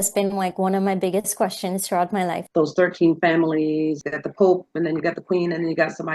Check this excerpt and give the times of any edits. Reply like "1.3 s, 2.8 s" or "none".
2.4 s, 4.0 s